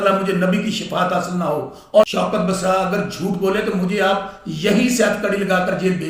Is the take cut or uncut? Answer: cut